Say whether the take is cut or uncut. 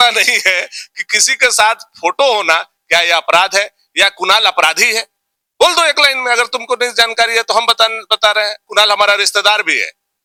uncut